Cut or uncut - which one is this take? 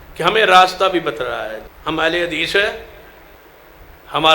cut